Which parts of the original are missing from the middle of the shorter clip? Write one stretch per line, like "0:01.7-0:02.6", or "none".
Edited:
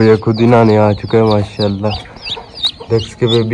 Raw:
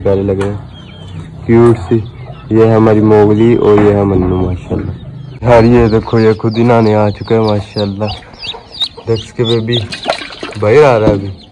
none